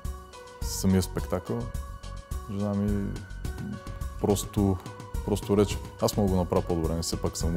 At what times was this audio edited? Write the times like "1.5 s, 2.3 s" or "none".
none